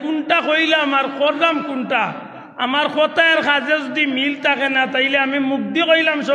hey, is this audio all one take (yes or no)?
yes